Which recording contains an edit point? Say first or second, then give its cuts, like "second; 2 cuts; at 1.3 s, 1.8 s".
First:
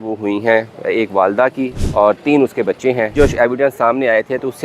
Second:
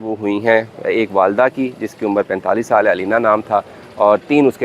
first; 2 cuts; at 1.8 s, 3.1 s